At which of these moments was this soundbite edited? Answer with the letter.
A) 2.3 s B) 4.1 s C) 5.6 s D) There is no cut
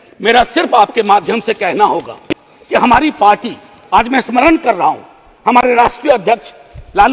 D